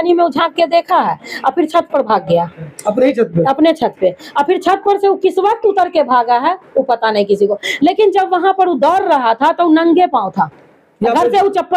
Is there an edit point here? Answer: no; 0 cuts

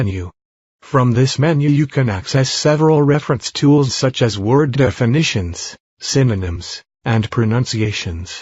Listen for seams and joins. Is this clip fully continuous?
no; 1 cut; at 7.2 s

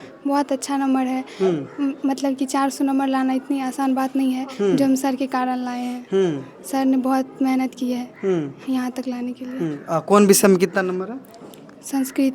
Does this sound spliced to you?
no; 0 cuts

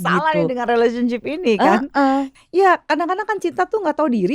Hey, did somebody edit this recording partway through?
yes; 1 cut; at 2.3 s

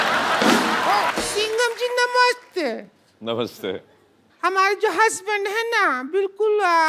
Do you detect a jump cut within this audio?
yes; 1 cut; at 1.1 s

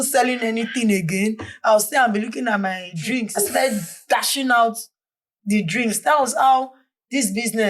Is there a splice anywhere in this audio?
yes; 1 cut; at 3.3 s

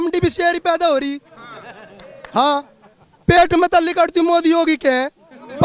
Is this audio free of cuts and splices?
yes; 0 cuts

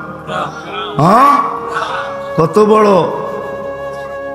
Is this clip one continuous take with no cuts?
no; 1 cut; at 3.4 s

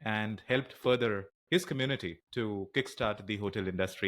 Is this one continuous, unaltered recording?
no; 2 cuts; at 1.3 s, 2.2 s

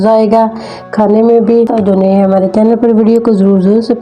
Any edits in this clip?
yes; 1 cut; at 1.7 s

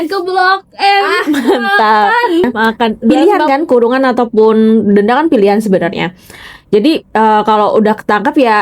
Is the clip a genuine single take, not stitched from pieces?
no; 1 cut; at 3.1 s

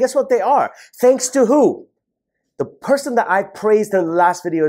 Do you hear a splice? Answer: no; 0 cuts

